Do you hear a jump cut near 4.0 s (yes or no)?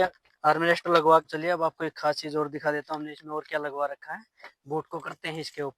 no